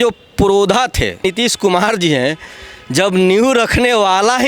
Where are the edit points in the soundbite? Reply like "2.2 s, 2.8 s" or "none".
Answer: 1.2 s

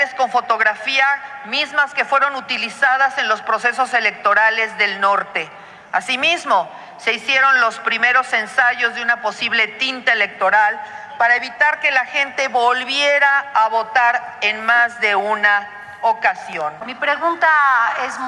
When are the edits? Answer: 16.9 s

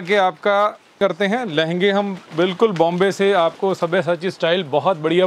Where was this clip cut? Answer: 1.0 s

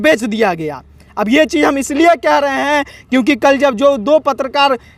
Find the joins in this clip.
none

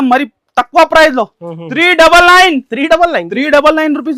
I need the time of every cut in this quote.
none

